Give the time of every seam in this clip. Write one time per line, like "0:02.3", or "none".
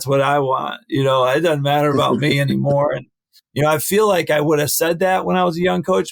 none